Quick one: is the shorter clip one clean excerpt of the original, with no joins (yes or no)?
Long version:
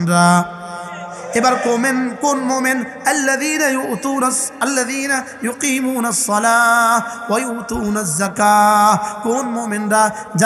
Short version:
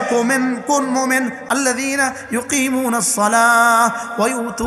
no